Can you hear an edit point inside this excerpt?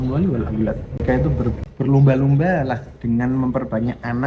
no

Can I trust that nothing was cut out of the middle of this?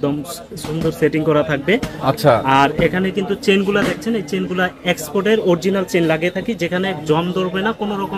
yes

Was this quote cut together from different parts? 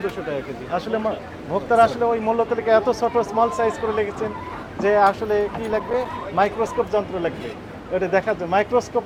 no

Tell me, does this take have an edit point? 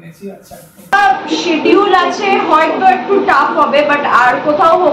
yes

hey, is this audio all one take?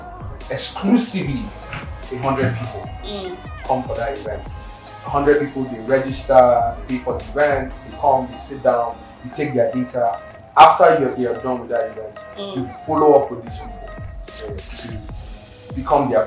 yes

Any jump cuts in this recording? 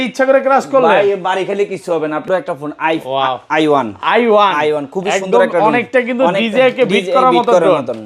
no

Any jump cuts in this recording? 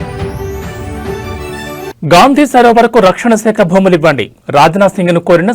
yes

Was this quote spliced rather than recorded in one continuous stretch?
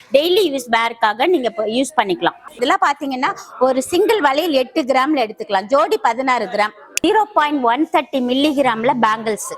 yes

